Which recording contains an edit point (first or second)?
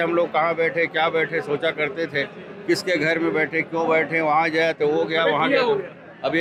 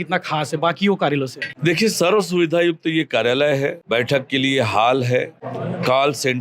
second